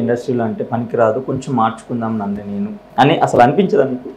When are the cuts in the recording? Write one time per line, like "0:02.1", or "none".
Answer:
0:02.8